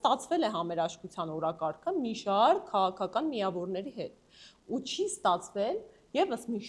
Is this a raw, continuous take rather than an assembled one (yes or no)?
yes